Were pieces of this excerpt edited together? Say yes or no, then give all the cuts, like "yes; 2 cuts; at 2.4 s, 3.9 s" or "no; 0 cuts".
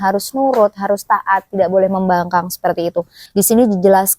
yes; 1 cut; at 3.2 s